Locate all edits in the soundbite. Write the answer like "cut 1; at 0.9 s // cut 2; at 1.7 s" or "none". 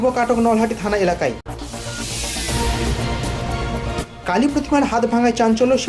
cut 1; at 1.5 s // cut 2; at 3.1 s // cut 3; at 4.0 s

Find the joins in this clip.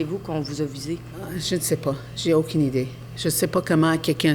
cut 1; at 1.2 s

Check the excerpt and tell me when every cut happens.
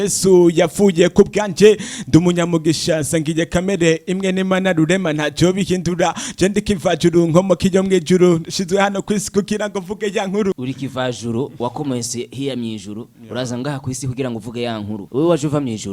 cut 1; at 10.5 s // cut 2; at 15.0 s

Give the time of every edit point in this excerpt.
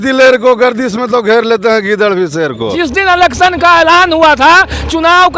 cut 1; at 2.8 s

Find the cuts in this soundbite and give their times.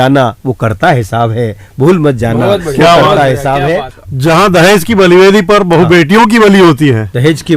cut 1; at 3.9 s

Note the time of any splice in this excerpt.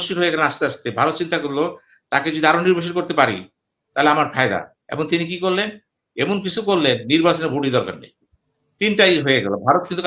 none

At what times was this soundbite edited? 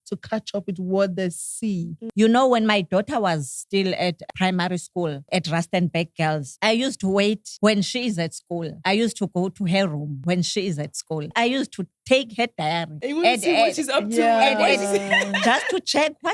cut 1; at 2.0 s // cut 2; at 4.3 s // cut 3; at 5.2 s // cut 4; at 6.5 s // cut 5; at 7.5 s // cut 6; at 8.7 s // cut 7; at 10.1 s // cut 8; at 11.3 s // cut 9; at 12.9 s

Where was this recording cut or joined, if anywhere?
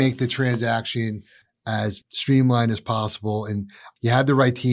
none

